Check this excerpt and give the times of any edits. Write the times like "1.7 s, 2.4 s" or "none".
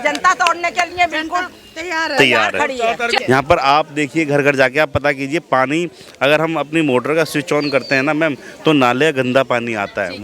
3.2 s